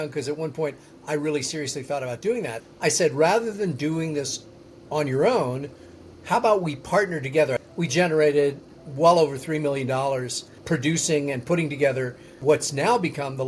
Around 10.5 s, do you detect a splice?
yes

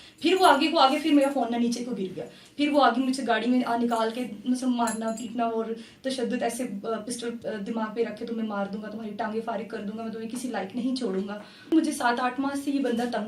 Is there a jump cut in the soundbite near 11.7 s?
yes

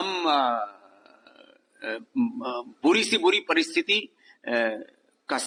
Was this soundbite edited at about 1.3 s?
no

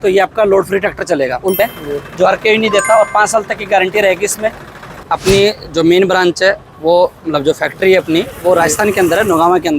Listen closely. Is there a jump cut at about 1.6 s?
yes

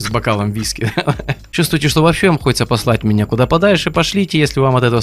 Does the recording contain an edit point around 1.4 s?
yes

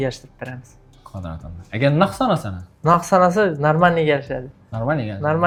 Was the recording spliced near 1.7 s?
no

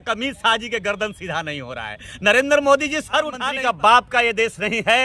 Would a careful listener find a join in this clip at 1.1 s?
no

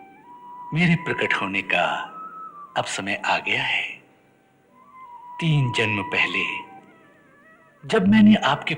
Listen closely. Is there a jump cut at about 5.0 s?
yes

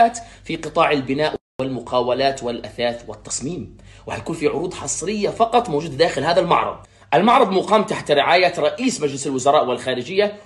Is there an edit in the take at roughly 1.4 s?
no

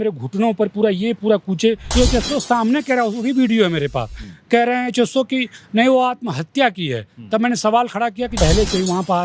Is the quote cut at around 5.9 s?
no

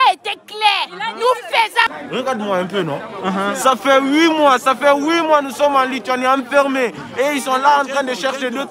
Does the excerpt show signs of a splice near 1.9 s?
yes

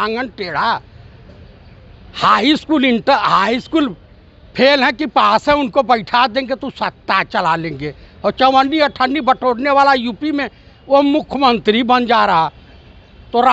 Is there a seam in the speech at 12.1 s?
no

